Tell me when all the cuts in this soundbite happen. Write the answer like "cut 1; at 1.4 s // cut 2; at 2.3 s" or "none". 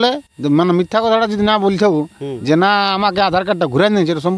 none